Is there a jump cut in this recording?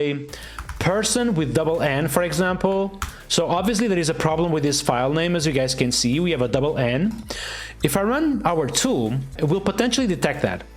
yes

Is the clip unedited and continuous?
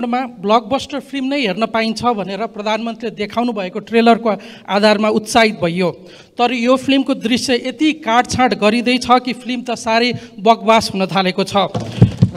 yes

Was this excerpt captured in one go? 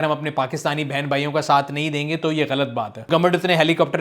no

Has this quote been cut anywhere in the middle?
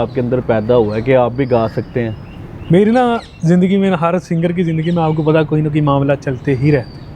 no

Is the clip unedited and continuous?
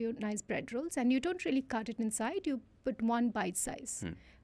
yes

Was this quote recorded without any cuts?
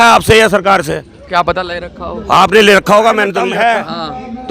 no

